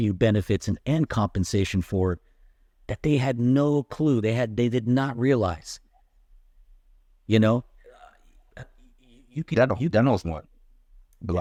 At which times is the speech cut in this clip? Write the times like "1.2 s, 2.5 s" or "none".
none